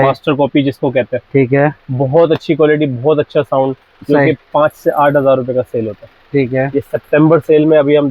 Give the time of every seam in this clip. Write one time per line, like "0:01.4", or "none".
none